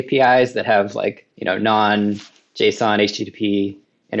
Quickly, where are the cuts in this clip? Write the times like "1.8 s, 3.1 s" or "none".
1.3 s